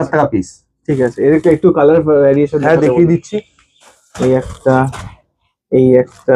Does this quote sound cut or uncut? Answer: uncut